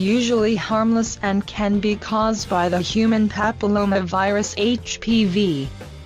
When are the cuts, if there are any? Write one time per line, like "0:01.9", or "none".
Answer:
0:04.6